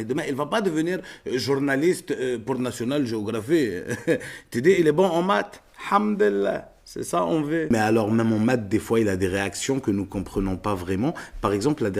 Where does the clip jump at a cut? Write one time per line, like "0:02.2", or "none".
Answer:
0:07.7